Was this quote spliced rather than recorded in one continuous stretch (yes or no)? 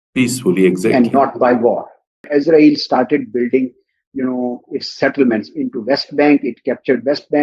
yes